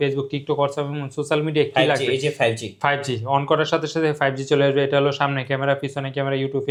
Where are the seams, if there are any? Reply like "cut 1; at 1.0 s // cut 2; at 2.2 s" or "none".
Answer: none